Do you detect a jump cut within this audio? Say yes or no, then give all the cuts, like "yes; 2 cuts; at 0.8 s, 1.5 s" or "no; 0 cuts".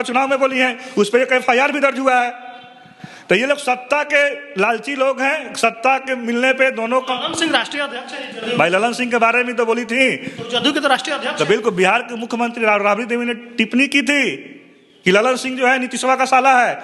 no; 0 cuts